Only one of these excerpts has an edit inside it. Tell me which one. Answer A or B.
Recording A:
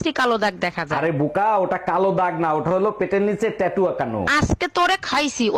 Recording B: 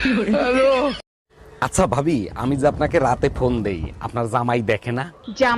B